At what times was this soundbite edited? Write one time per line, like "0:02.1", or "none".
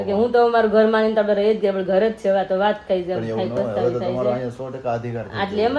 none